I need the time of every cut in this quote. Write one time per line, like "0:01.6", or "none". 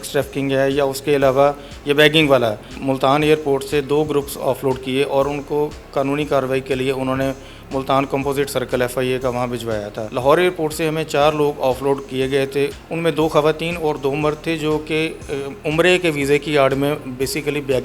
0:02.7
0:10.0
0:12.8